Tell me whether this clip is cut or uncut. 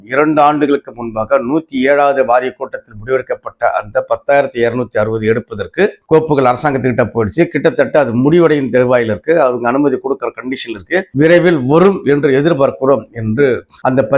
uncut